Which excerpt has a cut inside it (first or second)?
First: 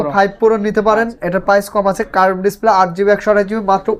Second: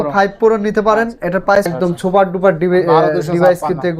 second